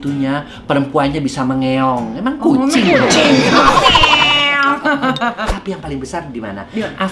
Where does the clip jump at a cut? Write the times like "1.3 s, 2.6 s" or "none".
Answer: 5.5 s